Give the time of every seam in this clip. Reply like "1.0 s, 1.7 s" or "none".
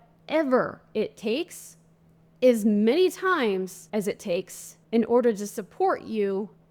4.2 s